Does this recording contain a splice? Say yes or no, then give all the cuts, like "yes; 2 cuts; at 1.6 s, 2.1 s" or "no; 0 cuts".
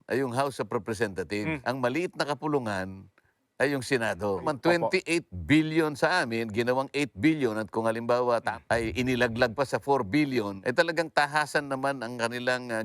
yes; 4 cuts; at 1.6 s, 4.4 s, 8.5 s, 10.6 s